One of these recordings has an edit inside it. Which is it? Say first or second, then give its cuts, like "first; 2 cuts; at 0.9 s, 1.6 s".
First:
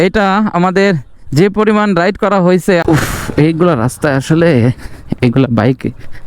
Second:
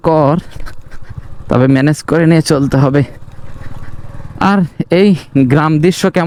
first; 1 cut; at 2.8 s